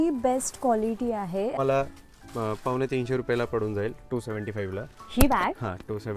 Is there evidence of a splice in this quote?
yes; 1 cut; at 1.5 s

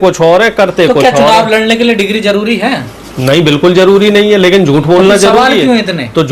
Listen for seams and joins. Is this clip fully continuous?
yes; 0 cuts

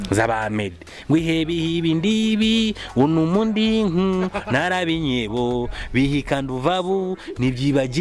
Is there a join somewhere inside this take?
no; 0 cuts

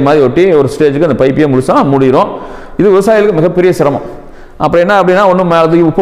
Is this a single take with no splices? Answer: yes; 0 cuts

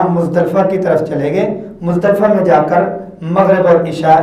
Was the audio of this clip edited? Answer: no; 0 cuts

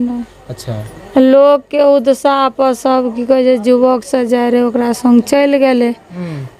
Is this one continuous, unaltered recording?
yes; 0 cuts

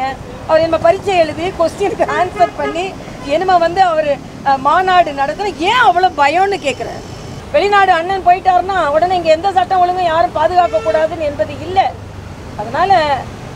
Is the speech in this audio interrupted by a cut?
yes; 1 cut; at 7.4 s

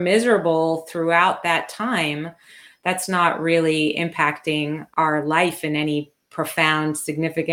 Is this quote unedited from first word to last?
no; 1 cut; at 4.8 s

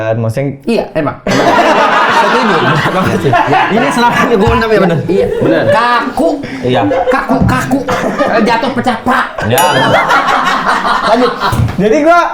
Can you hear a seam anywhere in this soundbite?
no; 0 cuts

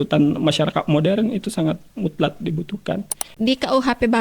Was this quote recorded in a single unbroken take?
no; 1 cut; at 3.3 s

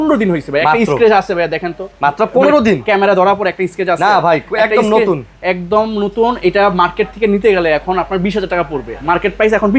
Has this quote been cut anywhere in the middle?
no; 0 cuts

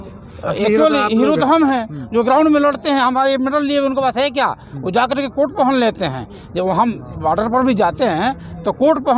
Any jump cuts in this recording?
no; 0 cuts

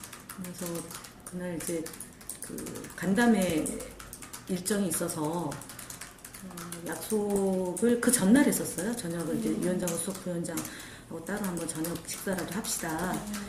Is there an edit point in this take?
yes; 1 cut; at 4.6 s

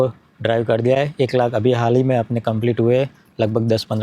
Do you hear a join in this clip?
no; 0 cuts

